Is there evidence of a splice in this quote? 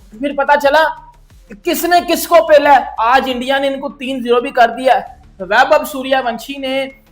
yes; 1 cut; at 2.9 s

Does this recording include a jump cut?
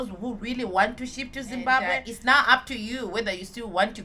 yes; 1 cut; at 1.9 s

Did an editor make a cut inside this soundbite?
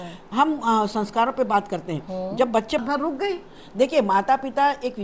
yes; 1 cut; at 2.8 s

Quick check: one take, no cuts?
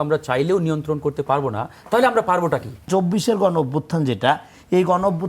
no; 1 cut; at 2.9 s

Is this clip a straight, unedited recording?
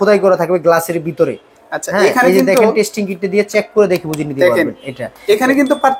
yes; 0 cuts

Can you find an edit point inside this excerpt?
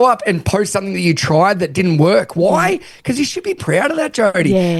yes; 1 cut; at 3.6 s

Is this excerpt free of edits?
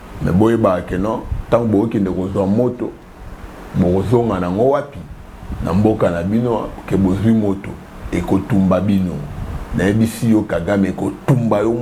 yes; 0 cuts

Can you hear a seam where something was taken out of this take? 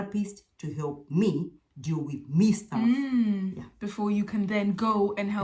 no; 0 cuts

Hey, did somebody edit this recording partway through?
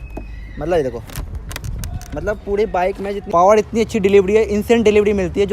yes; 1 cut; at 3.2 s

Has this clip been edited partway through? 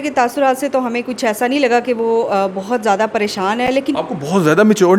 no; 0 cuts

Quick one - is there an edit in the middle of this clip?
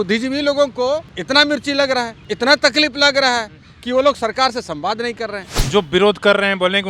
yes; 3 cuts; at 1.1 s, 2.2 s, 5.5 s

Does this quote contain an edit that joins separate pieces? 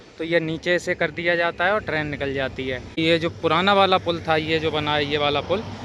yes; 1 cut; at 3.0 s

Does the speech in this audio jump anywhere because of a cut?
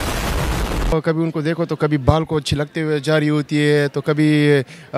yes; 1 cut; at 0.9 s

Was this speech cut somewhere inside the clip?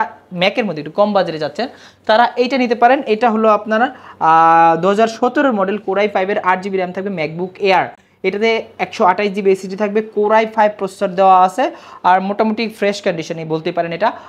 no; 0 cuts

